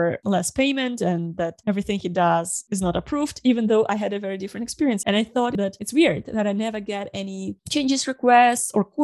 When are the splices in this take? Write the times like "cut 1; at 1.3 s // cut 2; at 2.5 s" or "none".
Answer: cut 1; at 5.4 s